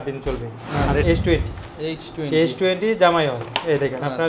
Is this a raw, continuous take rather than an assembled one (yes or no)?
no